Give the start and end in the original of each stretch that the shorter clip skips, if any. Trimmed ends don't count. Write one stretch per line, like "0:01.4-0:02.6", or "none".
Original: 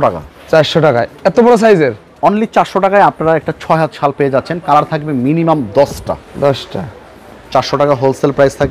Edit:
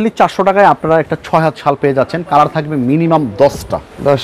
none